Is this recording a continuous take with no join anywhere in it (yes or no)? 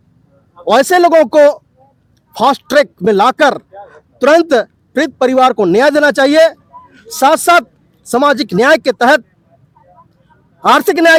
yes